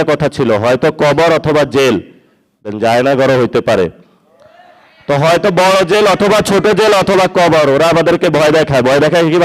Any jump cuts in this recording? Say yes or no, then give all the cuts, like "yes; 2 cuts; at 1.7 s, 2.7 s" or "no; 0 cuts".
yes; 1 cut; at 2.7 s